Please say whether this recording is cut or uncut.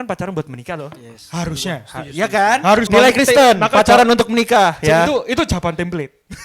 cut